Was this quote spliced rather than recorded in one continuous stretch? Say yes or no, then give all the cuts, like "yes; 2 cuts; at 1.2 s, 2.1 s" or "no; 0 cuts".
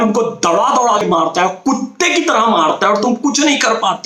yes; 1 cut; at 1.0 s